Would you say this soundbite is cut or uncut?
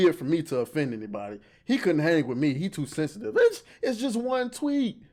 uncut